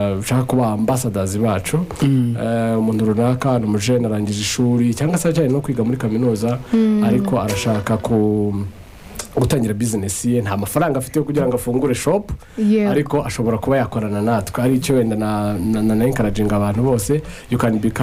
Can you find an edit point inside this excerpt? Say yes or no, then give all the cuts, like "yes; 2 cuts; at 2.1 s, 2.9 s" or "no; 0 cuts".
no; 0 cuts